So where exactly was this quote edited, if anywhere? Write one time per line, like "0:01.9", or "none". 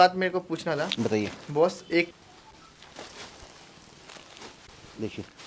0:02.1